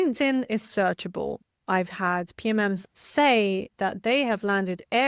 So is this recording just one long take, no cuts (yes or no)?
no